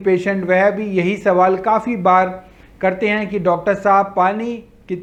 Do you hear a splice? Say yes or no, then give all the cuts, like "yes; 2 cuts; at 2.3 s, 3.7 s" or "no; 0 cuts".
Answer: no; 0 cuts